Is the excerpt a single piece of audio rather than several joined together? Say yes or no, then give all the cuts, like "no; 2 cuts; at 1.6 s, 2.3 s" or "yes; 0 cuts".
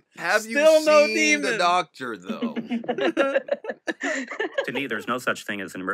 no; 1 cut; at 4.7 s